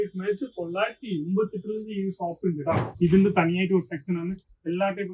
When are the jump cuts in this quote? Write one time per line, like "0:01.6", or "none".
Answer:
0:02.9